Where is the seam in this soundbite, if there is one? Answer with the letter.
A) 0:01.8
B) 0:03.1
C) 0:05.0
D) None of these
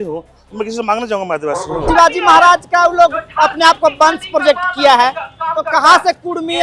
A